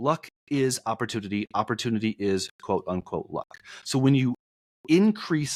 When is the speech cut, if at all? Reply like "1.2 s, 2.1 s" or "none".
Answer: none